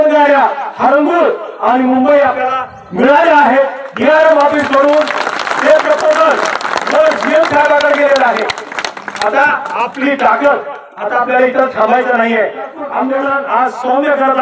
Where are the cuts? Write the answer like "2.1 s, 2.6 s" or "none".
12.8 s